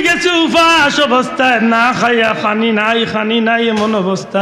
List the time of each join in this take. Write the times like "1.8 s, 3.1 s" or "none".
none